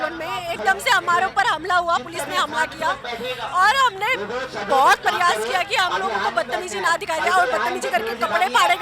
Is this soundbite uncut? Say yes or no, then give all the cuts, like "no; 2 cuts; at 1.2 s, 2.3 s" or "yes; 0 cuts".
yes; 0 cuts